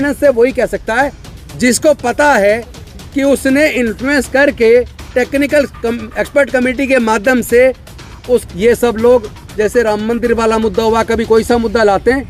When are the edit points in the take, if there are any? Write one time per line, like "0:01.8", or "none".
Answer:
0:08.5